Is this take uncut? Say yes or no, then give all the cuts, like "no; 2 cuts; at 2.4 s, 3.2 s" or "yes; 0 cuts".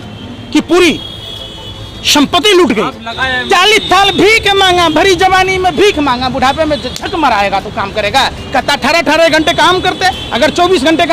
no; 1 cut; at 3.2 s